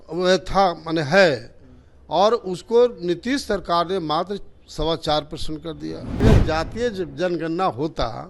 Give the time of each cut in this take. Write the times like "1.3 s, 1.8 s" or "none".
6.2 s